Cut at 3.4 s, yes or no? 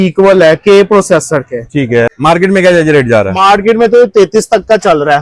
no